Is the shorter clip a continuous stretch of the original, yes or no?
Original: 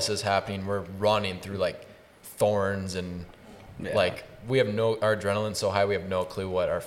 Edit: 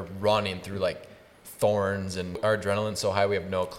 no